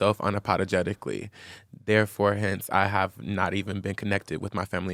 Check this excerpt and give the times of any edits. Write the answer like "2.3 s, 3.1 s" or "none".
none